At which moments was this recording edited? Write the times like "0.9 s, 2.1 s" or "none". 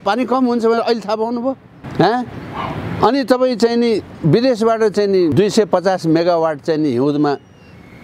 1.8 s, 5.3 s